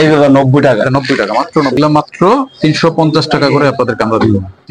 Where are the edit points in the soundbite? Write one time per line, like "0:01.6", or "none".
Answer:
0:01.8